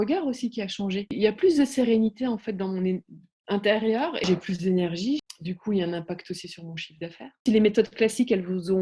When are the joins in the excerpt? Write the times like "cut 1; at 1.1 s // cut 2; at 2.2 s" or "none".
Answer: cut 1; at 1.1 s // cut 2; at 4.2 s // cut 3; at 5.2 s // cut 4; at 7.4 s